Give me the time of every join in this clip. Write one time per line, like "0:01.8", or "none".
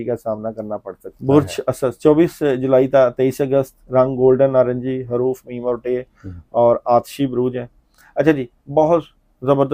0:01.1